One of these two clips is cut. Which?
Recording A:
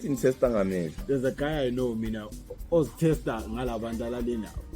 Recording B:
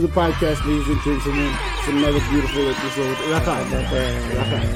A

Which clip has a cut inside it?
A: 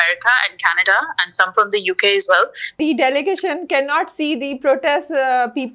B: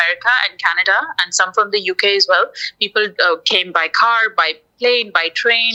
A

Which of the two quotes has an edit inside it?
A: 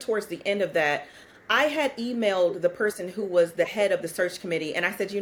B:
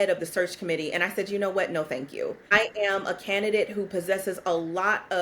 B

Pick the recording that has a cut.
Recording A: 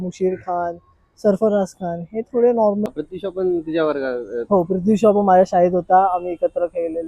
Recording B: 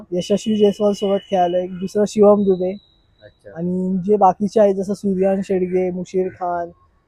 A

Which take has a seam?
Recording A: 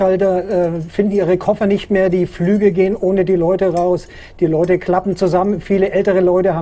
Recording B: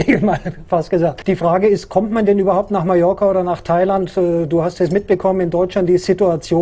B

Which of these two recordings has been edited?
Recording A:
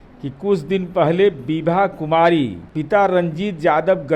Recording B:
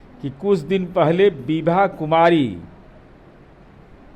A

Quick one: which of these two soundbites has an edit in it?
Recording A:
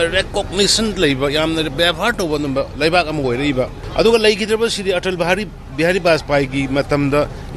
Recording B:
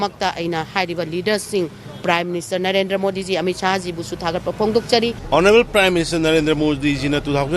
B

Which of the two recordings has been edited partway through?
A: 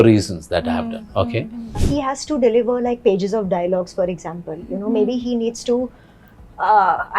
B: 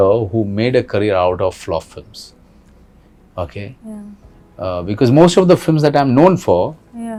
A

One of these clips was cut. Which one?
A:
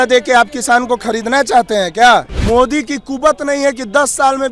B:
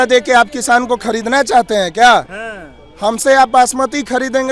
A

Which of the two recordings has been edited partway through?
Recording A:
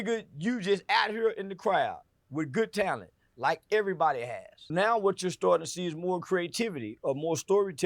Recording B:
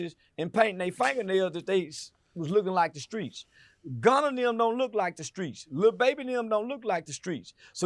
A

